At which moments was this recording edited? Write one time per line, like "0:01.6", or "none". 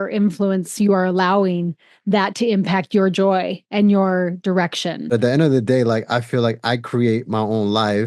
0:05.1